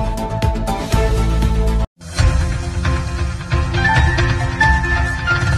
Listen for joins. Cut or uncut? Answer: uncut